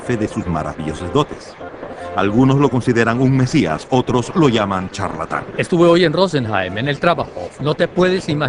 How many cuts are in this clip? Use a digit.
1